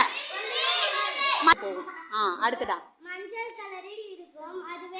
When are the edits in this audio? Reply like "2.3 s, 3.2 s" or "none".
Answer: 1.5 s